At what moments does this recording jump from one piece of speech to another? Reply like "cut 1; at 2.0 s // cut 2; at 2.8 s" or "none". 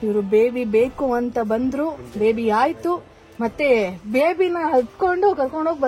none